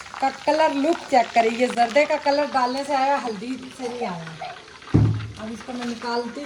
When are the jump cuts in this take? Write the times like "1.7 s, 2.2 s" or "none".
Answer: none